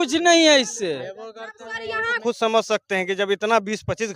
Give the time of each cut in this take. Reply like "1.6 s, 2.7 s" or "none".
2.2 s